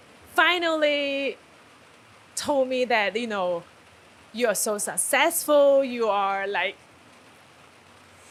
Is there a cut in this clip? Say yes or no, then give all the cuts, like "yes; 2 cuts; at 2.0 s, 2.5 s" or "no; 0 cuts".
no; 0 cuts